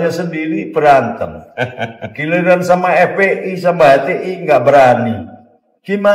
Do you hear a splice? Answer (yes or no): no